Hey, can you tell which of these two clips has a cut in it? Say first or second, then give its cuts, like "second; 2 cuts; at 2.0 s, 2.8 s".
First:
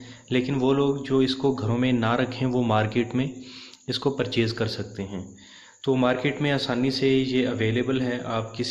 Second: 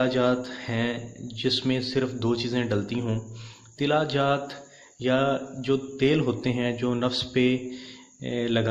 second; 1 cut; at 2.0 s